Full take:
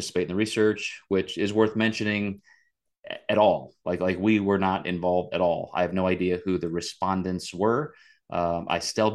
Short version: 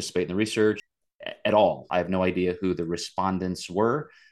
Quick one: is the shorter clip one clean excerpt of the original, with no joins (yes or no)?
no